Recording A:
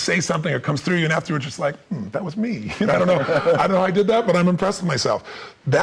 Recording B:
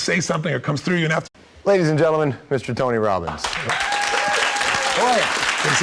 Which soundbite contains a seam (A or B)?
A